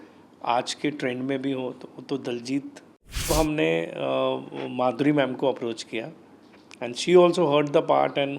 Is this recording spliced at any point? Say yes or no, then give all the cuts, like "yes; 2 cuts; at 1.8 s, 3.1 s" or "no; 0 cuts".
yes; 1 cut; at 3.3 s